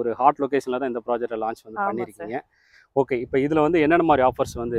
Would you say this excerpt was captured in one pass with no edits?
yes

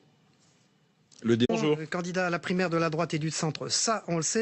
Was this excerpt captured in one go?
yes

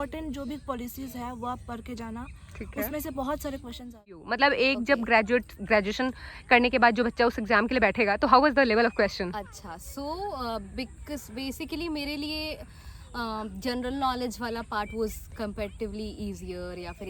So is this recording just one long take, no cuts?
no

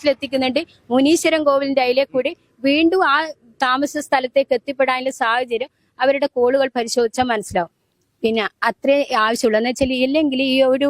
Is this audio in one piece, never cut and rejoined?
yes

